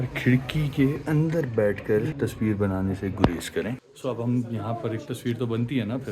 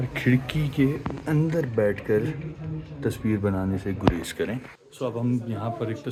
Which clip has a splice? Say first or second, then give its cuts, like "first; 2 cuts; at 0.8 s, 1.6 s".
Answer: first; 3 cuts; at 1.0 s, 2.1 s, 3.9 s